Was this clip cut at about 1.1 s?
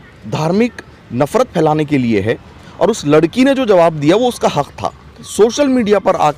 no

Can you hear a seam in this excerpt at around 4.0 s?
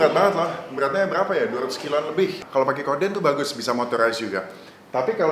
no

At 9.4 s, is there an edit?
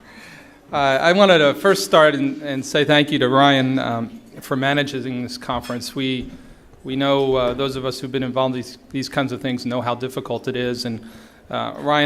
no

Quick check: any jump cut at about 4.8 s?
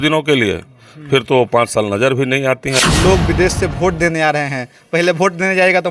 no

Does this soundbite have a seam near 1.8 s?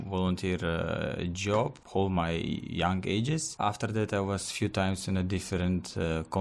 yes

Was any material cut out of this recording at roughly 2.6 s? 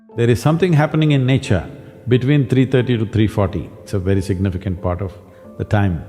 no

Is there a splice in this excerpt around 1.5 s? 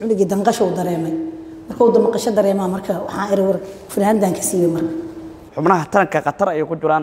no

